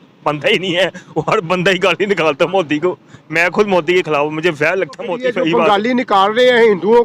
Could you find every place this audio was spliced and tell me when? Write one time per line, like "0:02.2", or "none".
0:05.0